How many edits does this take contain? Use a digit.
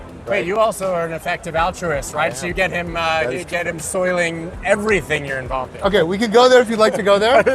1